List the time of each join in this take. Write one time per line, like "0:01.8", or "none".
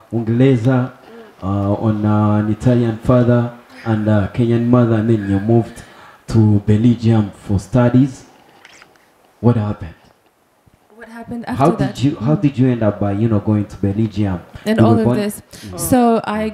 none